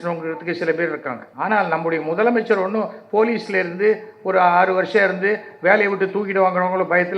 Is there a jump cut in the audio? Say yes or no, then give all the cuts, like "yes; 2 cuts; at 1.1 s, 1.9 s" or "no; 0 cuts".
yes; 1 cut; at 1.2 s